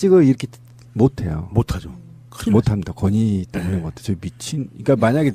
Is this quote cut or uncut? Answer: cut